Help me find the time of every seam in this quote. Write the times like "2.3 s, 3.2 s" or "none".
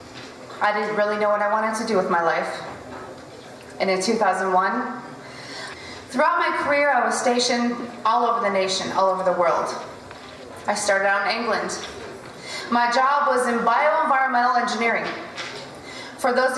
none